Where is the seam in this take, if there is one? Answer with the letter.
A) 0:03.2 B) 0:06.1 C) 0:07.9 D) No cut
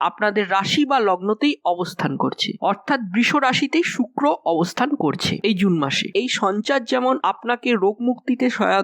B